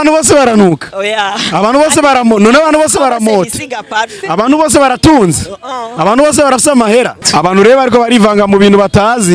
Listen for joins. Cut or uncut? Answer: cut